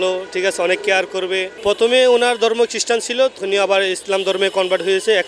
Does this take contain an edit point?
yes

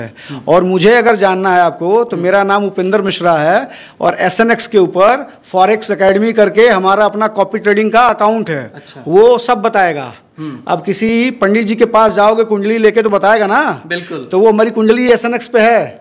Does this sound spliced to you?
no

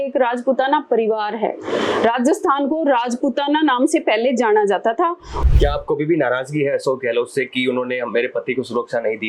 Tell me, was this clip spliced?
yes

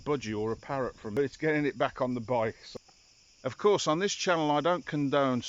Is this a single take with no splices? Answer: no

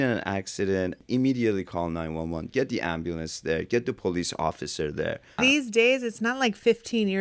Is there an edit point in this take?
yes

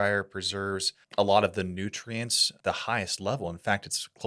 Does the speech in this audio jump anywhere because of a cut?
yes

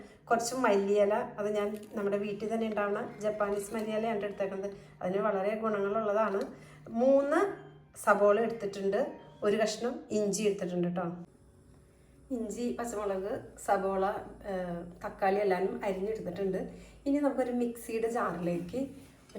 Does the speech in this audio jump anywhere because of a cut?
yes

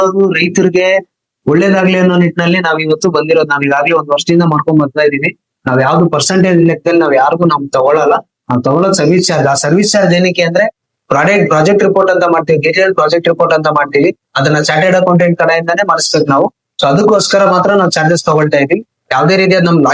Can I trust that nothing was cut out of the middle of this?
yes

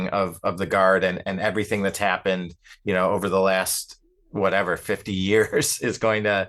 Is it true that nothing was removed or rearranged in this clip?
yes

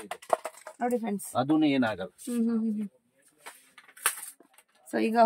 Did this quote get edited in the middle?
no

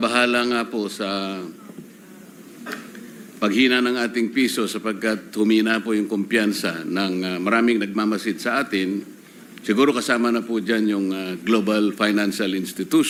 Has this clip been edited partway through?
no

